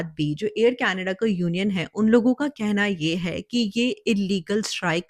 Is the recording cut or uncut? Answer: uncut